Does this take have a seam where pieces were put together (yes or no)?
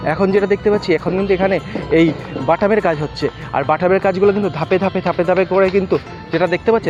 no